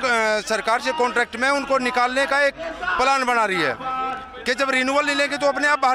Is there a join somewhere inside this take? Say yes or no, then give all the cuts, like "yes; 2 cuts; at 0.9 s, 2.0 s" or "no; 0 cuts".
no; 0 cuts